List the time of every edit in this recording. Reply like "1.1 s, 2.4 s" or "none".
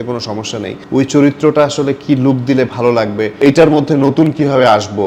0.8 s, 3.3 s